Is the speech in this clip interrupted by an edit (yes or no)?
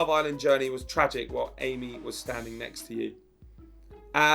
no